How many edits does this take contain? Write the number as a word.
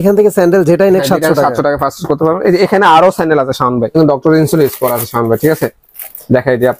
one